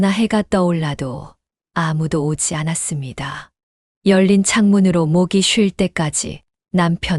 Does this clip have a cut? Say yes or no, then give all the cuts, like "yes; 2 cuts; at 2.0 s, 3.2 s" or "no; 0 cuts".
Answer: no; 0 cuts